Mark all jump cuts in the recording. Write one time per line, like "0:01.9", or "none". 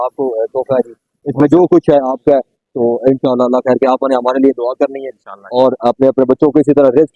none